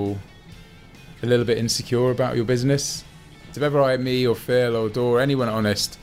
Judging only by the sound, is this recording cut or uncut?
cut